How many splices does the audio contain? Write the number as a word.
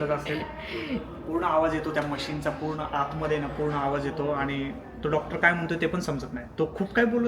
zero